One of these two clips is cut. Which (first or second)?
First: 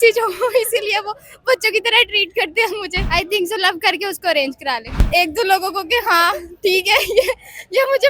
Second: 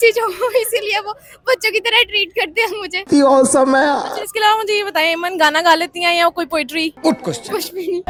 first